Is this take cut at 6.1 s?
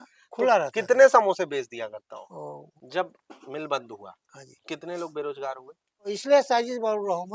yes; 2 cuts; at 2.7 s, 6.1 s

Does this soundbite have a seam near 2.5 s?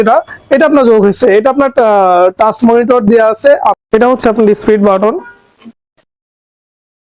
no; 1 cut; at 3.8 s

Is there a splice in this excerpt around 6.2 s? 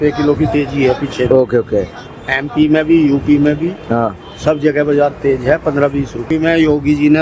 yes; 1 cut; at 6.2 s

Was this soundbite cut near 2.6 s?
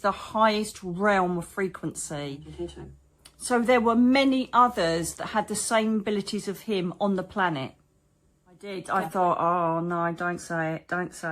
yes; 2 cuts; at 2.6 s, 8.8 s

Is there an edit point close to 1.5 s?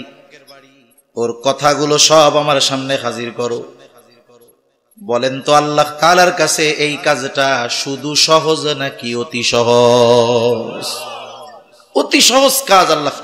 no; 0 cuts

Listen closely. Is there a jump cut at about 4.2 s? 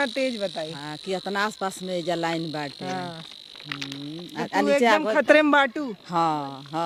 no; 0 cuts

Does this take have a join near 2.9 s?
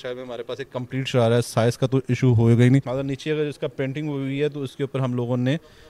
yes; 1 cut; at 2.9 s

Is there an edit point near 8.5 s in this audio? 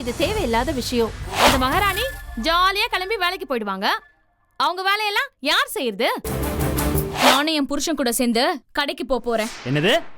no; 2 cuts; at 1.3 s, 7.1 s

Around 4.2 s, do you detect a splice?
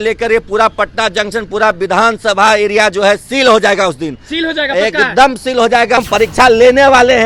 no; 1 cut; at 6.0 s

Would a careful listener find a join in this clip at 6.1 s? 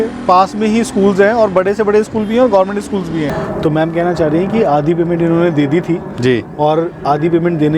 no; 1 cut; at 3.3 s

